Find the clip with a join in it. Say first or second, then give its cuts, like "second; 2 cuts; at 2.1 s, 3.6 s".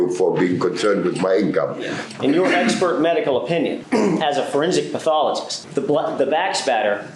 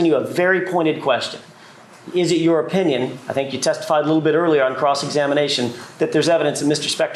first; 3 cuts; at 2.0 s, 3.8 s, 5.5 s